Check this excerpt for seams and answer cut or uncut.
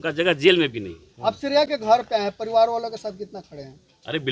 uncut